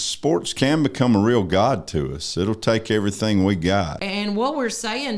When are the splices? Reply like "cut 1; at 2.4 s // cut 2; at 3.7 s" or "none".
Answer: cut 1; at 4.0 s